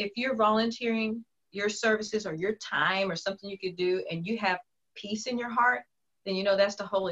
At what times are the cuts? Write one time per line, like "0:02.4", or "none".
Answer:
none